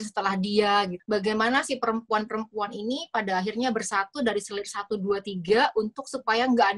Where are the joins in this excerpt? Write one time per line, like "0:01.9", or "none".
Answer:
0:01.0